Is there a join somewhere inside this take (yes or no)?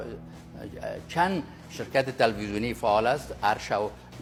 no